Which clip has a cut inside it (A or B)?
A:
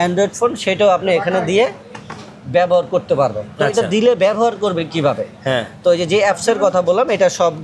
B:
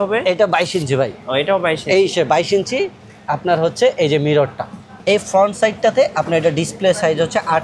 B